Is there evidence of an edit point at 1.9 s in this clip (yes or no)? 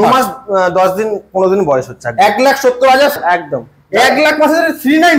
no